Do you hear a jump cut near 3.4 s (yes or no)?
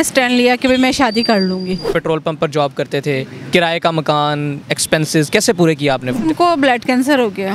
no